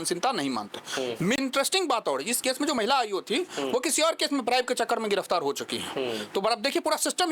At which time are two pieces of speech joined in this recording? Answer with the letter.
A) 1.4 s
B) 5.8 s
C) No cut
A